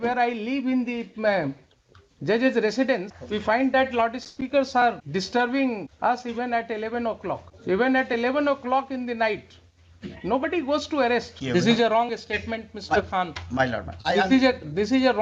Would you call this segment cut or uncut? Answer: cut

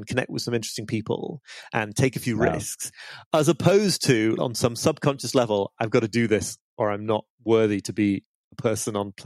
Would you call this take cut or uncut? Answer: cut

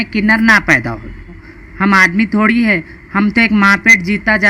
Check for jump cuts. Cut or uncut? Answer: cut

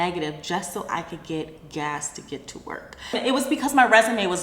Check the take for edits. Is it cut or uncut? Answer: cut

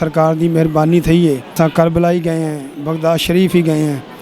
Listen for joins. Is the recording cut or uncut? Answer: cut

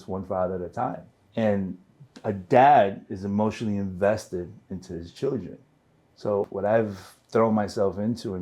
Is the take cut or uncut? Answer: cut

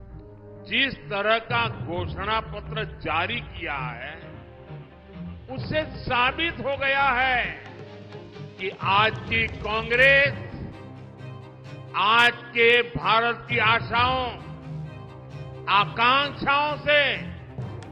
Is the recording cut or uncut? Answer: uncut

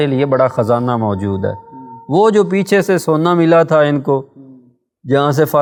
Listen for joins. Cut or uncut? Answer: uncut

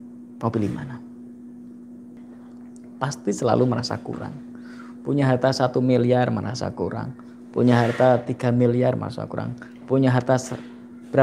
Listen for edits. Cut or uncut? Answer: cut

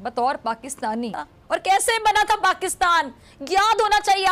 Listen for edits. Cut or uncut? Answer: cut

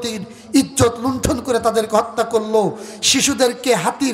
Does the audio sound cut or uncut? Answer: uncut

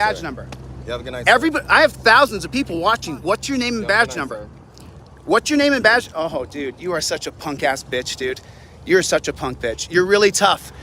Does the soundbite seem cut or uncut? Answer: uncut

